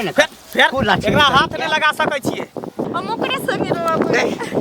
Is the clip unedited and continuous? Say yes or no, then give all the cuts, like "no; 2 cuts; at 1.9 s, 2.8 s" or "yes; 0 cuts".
no; 1 cut; at 2.8 s